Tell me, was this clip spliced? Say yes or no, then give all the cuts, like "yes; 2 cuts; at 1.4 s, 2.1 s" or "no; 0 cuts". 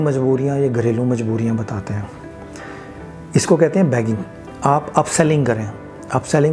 no; 0 cuts